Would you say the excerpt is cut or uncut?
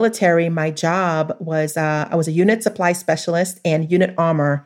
uncut